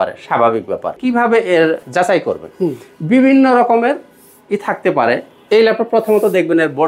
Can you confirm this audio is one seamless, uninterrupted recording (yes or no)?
no